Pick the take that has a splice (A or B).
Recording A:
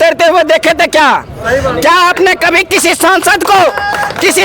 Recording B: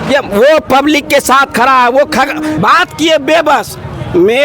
B